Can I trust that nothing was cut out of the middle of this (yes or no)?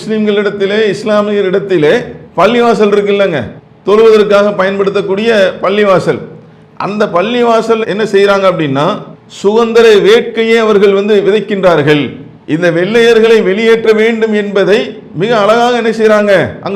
yes